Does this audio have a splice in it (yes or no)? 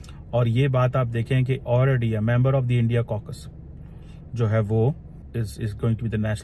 yes